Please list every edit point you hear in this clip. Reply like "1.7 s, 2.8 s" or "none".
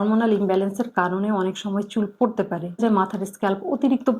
2.8 s